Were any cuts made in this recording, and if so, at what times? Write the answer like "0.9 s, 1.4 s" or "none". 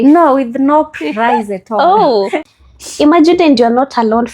2.4 s